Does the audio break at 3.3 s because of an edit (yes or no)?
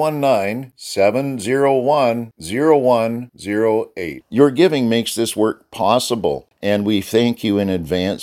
no